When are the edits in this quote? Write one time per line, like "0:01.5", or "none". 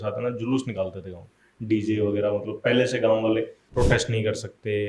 0:03.6

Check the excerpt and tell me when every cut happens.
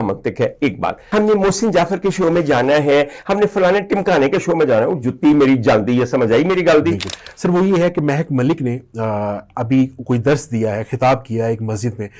0:01.0
0:07.1

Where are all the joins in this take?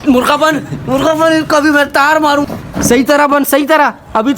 0:02.4

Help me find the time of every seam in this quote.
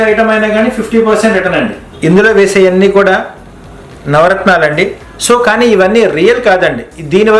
0:01.8

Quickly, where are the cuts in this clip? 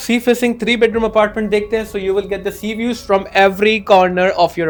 none

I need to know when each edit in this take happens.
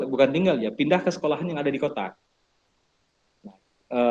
none

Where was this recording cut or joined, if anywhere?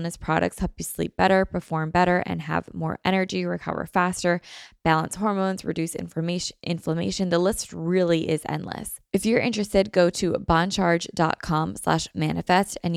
0:08.9

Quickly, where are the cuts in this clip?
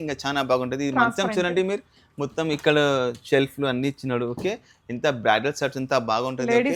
none

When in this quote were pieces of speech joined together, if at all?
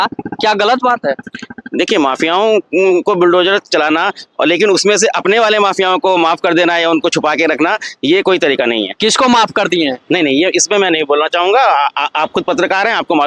none

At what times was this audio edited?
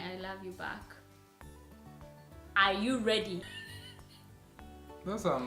0:03.6

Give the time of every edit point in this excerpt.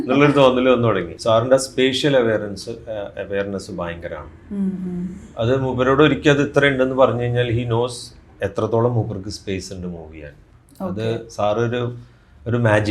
0:01.1

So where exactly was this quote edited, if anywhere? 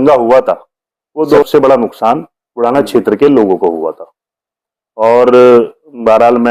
0:01.4

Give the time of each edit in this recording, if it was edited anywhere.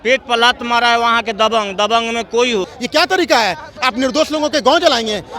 0:02.8

